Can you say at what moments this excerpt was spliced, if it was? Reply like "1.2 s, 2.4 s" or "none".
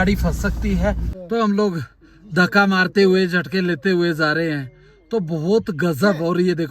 1.1 s